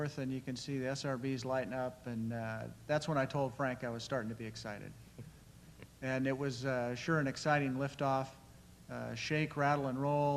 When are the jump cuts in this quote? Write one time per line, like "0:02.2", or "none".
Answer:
0:03.7